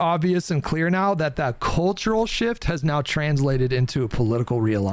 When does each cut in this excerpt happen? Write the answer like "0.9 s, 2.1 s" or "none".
none